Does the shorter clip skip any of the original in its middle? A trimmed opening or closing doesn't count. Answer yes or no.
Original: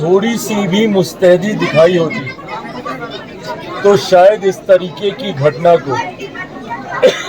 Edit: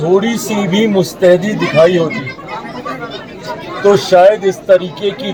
no